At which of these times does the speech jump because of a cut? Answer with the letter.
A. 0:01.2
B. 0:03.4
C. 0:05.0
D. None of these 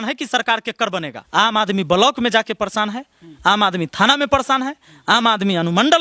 A